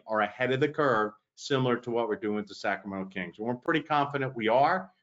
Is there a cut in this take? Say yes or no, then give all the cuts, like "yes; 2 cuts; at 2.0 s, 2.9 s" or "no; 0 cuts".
no; 0 cuts